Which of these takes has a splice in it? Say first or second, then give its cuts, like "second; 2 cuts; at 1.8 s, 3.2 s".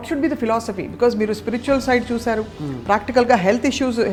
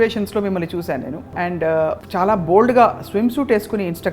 second; 2 cuts; at 1.2 s, 2.0 s